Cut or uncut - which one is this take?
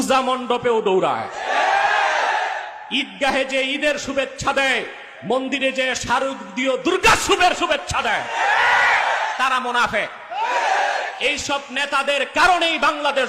uncut